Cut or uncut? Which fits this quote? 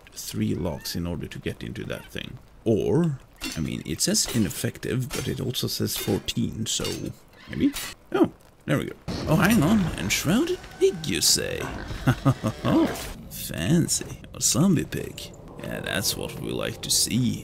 cut